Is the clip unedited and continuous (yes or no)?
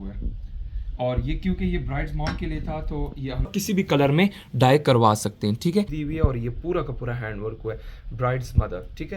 no